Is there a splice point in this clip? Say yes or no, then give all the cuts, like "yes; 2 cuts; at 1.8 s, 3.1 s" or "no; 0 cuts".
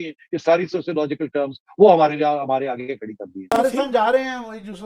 yes; 1 cut; at 3.5 s